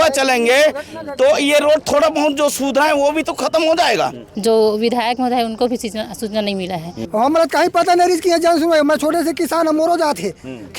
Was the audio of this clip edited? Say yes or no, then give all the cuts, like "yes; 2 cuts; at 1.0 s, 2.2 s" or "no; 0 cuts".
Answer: yes; 2 cuts; at 4.2 s, 6.9 s